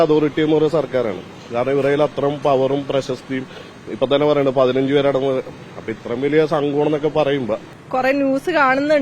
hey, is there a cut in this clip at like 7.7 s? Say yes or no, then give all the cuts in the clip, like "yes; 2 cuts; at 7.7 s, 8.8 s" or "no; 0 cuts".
yes; 1 cut; at 7.7 s